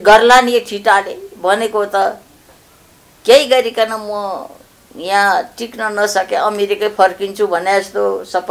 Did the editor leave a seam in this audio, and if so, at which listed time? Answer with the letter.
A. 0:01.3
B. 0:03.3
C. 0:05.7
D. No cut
D